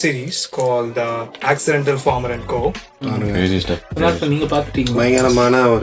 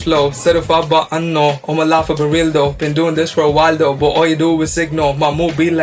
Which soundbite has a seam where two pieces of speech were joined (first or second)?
first